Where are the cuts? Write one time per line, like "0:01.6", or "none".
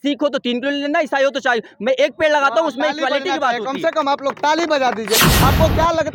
0:05.2